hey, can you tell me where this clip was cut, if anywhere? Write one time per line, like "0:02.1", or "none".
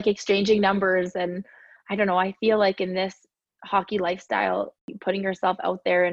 0:04.9